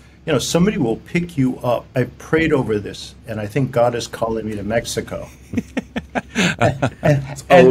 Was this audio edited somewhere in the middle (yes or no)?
yes